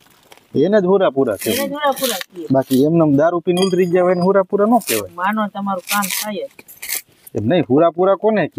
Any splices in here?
no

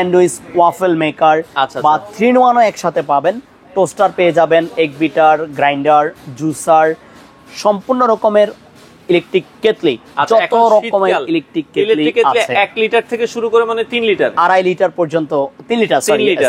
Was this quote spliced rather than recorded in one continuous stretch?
no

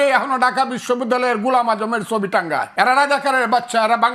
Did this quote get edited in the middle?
no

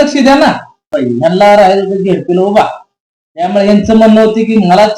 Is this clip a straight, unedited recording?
no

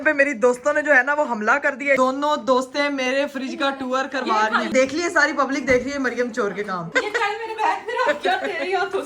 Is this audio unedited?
no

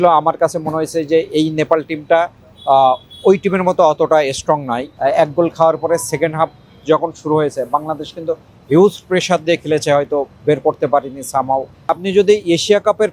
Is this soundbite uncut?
no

